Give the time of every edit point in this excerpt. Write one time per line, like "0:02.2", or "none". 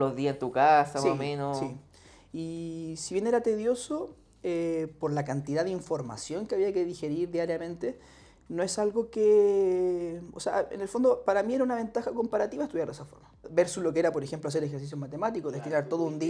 0:13.4